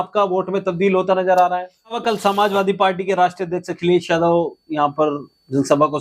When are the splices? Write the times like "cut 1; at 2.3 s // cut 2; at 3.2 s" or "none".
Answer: cut 1; at 2.0 s

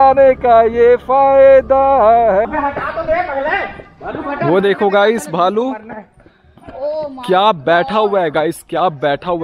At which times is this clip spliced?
cut 1; at 2.4 s

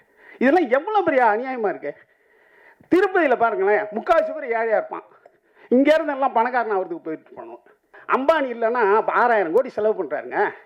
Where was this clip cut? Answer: cut 1; at 8.0 s

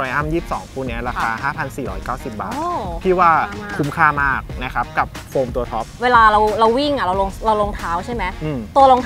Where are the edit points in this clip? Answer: cut 1; at 5.9 s

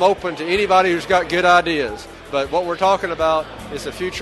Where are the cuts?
cut 1; at 2.2 s

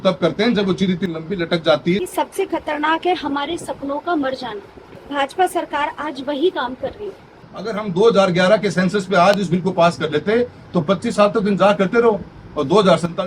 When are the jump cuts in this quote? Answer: cut 1; at 2.1 s // cut 2; at 7.8 s

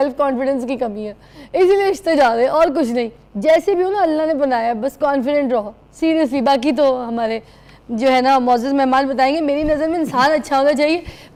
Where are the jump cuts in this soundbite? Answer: none

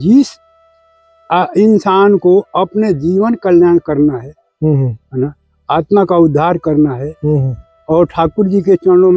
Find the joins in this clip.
none

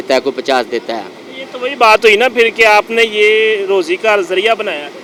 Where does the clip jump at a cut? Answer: none

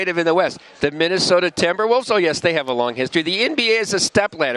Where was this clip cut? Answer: none

